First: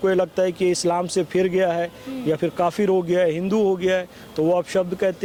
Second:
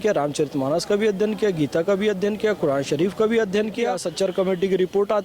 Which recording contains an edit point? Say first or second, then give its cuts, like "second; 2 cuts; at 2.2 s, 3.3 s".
second; 1 cut; at 4.0 s